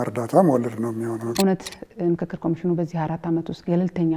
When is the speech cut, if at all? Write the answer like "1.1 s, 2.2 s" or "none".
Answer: 1.3 s